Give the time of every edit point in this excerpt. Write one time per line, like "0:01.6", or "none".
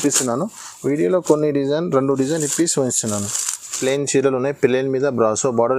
0:03.8